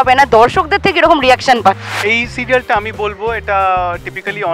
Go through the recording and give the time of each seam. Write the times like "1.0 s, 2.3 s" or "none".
1.9 s